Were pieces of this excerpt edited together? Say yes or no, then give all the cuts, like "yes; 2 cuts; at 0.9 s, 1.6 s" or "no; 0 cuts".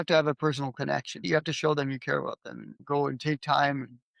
yes; 1 cut; at 1.2 s